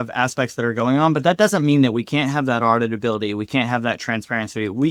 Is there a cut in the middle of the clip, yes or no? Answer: no